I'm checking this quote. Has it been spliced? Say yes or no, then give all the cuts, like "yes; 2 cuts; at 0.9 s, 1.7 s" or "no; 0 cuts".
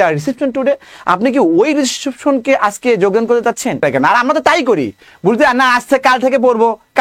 yes; 1 cut; at 3.8 s